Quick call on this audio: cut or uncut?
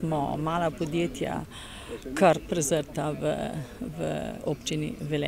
uncut